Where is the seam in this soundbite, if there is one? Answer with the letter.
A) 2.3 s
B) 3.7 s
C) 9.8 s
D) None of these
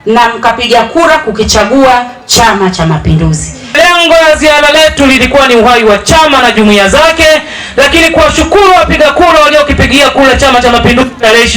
B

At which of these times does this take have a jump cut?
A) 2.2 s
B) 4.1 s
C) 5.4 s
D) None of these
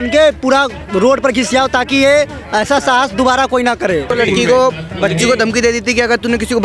B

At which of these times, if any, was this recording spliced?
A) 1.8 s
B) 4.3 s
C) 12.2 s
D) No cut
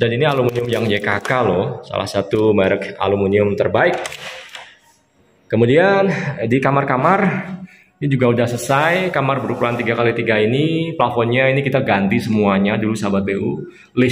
D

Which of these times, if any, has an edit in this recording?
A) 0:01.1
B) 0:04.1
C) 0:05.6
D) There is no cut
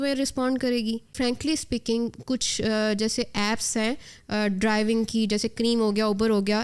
A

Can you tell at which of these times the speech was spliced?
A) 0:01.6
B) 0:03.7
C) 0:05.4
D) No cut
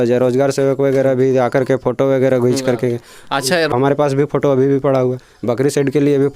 B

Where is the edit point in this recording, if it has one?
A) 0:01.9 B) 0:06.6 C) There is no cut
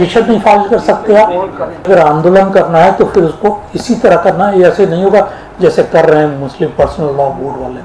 A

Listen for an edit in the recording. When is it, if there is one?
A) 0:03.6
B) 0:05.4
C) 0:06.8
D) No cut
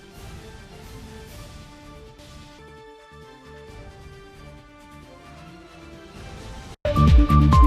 C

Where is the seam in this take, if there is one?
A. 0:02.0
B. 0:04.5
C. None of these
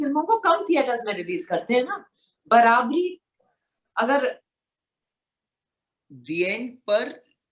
B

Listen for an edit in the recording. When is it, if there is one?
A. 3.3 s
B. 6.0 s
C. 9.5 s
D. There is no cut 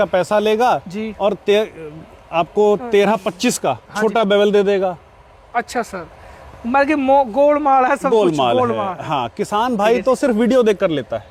D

